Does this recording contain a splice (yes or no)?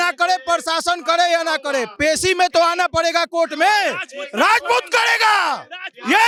no